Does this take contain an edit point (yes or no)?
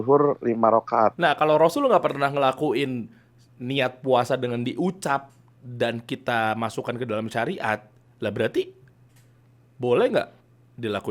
yes